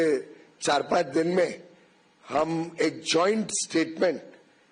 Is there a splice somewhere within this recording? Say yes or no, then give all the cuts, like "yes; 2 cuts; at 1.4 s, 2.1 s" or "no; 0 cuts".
no; 0 cuts